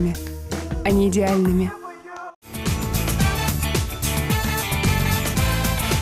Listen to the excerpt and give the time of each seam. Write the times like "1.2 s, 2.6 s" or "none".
none